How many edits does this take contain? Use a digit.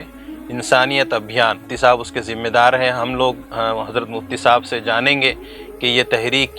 1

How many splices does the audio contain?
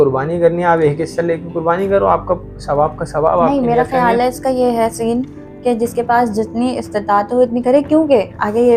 0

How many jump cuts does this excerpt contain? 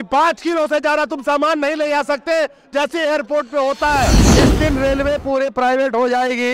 1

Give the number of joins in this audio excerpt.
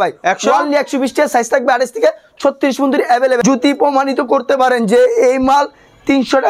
1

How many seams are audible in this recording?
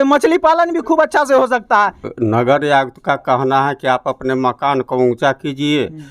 1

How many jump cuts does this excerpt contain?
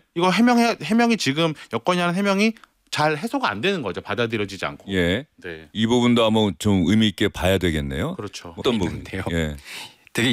1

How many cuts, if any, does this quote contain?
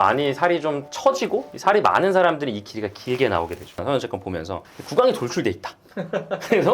1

